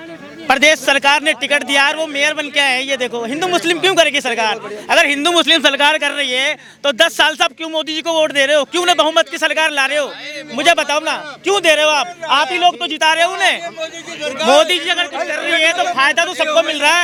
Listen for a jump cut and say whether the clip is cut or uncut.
uncut